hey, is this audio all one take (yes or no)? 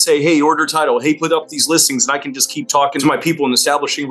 no